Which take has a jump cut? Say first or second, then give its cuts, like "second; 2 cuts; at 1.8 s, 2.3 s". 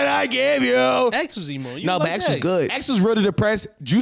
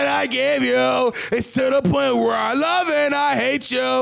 first; 2 cuts; at 1.2 s, 2.8 s